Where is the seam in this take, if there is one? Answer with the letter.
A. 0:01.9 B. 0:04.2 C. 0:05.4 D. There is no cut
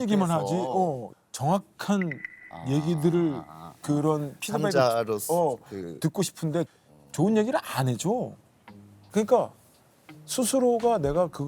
D